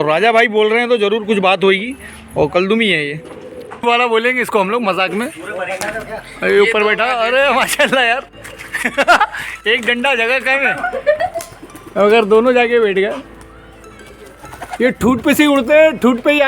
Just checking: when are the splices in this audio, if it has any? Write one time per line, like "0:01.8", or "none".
0:03.8